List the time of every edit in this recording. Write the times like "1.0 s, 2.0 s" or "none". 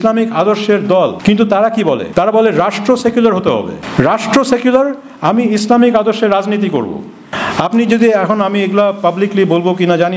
1.2 s, 2.0 s, 3.8 s, 7.3 s